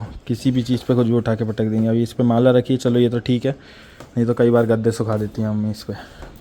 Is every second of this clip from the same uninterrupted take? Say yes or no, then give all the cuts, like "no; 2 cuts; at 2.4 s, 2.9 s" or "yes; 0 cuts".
yes; 0 cuts